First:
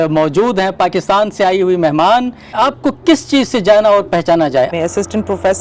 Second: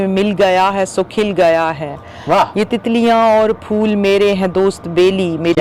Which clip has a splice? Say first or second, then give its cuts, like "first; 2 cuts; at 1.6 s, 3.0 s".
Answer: first; 2 cuts; at 2.5 s, 4.7 s